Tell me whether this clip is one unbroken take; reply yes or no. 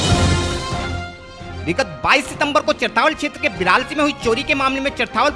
no